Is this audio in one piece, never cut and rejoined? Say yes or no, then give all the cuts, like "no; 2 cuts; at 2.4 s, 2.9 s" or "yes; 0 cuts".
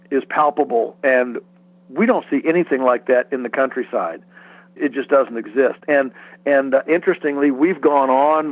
yes; 0 cuts